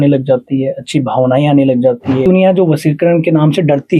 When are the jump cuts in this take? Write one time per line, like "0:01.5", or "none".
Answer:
0:02.2